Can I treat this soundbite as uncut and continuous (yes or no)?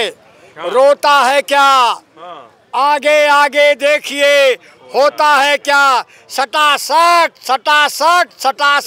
yes